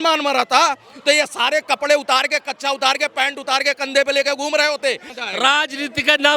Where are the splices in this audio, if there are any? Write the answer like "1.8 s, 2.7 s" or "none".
5.1 s